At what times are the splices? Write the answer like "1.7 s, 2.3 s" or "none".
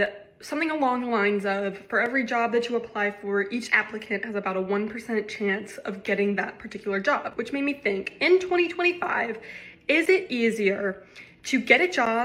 none